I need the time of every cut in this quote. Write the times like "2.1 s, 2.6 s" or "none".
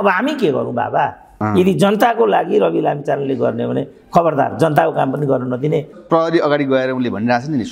1.3 s, 6.0 s